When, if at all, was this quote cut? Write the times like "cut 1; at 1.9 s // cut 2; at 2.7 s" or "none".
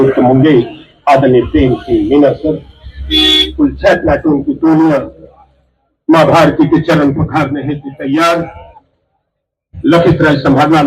none

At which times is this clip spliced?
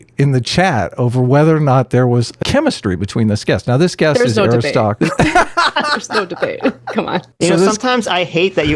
cut 1; at 2.4 s // cut 2; at 4.9 s // cut 3; at 7.3 s

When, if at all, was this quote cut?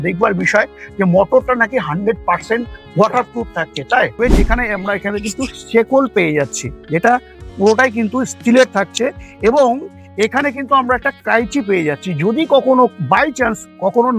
cut 1; at 4.1 s

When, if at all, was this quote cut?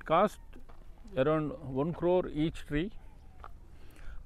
none

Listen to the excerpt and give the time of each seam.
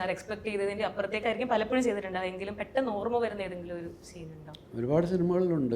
none

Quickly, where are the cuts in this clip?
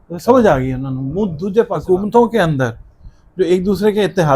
cut 1; at 1.8 s

